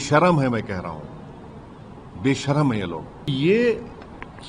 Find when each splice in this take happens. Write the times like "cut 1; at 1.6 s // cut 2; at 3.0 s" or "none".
cut 1; at 3.3 s